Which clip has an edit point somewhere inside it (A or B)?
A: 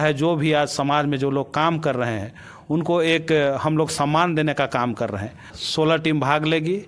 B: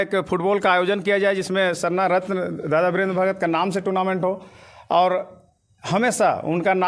A